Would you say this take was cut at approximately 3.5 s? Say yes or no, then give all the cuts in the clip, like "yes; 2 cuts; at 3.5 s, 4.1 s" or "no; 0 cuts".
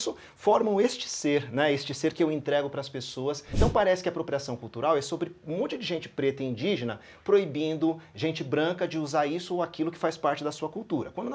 yes; 1 cut; at 3.5 s